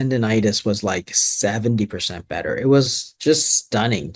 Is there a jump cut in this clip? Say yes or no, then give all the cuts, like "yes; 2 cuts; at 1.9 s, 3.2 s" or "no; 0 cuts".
no; 0 cuts